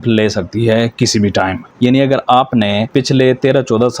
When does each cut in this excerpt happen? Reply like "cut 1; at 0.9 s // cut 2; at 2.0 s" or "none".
cut 1; at 1.6 s // cut 2; at 2.8 s